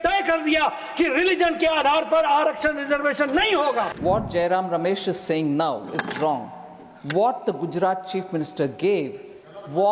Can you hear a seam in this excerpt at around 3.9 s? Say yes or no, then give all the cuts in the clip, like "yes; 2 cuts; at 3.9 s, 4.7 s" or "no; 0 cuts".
yes; 1 cut; at 3.9 s